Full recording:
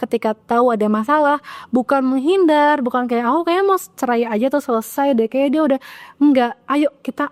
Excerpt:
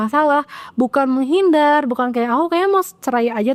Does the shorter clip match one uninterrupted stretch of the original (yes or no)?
yes